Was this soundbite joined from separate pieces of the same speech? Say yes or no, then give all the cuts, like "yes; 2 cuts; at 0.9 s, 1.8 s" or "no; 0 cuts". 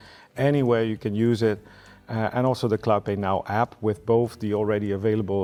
no; 0 cuts